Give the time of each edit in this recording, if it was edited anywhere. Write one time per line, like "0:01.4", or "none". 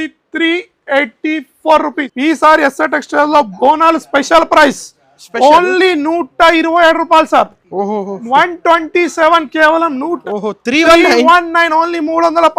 0:02.1
0:10.2